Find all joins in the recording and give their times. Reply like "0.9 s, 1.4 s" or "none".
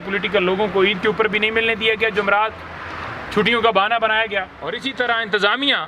4.8 s